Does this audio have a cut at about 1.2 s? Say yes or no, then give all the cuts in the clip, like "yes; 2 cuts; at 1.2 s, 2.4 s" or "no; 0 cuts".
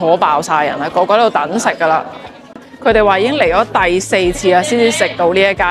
no; 1 cut; at 2.7 s